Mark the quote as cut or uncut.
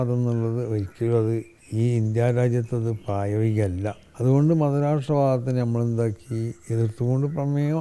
cut